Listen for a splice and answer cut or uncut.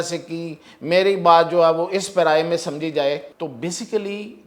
cut